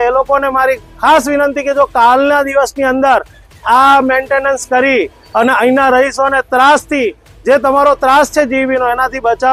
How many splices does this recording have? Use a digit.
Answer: 0